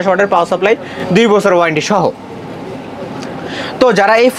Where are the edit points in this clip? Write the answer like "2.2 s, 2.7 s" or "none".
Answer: none